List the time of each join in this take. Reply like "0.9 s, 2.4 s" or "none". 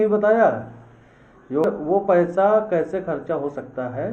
1.6 s

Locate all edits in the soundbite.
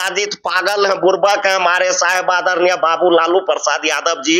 none

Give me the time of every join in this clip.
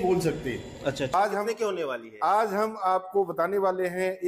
1.1 s

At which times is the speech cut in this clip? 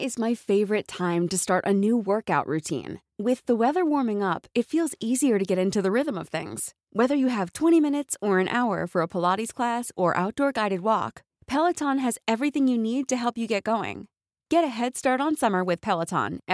none

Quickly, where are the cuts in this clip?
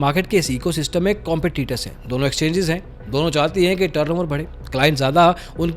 none

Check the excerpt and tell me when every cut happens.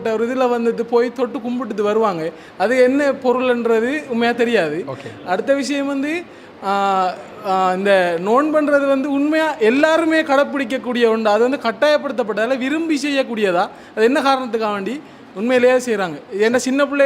none

